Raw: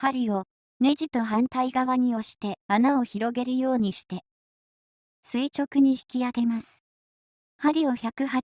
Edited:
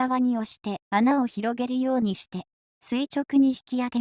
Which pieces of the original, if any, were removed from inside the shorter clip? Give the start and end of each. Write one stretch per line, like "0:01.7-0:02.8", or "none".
0:04.9-0:05.5